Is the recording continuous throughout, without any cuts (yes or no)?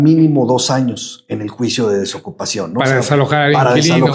yes